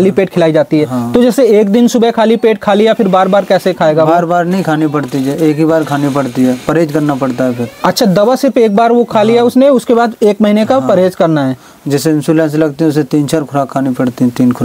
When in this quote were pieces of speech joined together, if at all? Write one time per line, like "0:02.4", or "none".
none